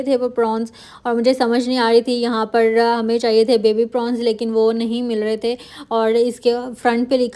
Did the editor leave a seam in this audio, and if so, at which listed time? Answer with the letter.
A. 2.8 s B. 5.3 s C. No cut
C